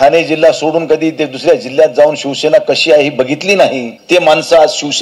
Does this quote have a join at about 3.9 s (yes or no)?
yes